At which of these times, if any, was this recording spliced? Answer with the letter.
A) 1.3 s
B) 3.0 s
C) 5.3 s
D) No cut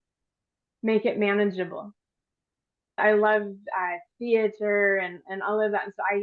B